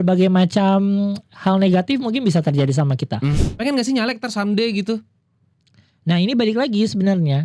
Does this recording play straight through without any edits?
no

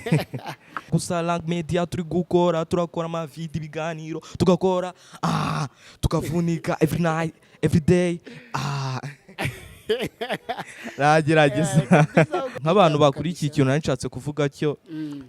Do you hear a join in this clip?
yes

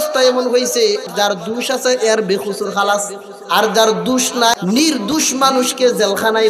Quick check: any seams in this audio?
yes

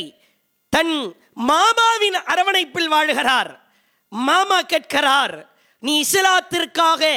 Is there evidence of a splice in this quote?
no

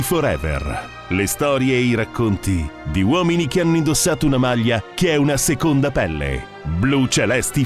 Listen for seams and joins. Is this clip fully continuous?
no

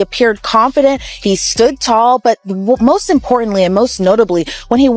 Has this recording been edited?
no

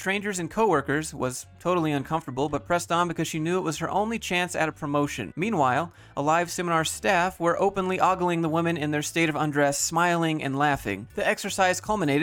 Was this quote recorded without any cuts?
yes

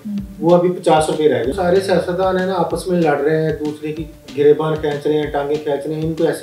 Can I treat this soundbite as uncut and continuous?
no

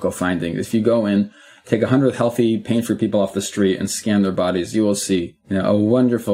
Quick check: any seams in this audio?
no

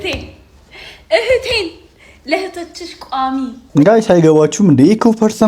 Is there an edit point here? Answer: yes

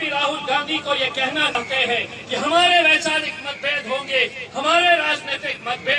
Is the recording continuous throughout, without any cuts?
no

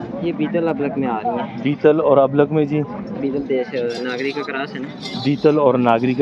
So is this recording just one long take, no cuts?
yes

